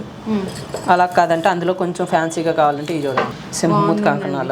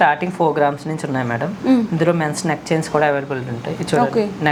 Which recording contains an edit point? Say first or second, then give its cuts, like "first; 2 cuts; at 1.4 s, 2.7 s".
first; 1 cut; at 3.3 s